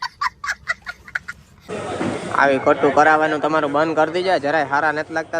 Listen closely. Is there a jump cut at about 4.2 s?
no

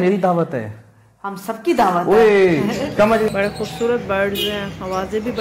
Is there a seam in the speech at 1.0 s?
no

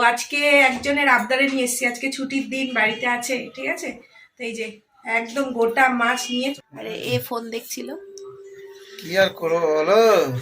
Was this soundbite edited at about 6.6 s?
yes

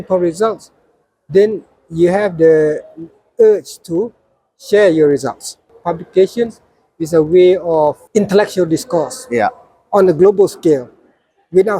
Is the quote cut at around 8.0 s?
yes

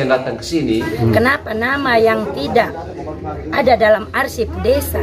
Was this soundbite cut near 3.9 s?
no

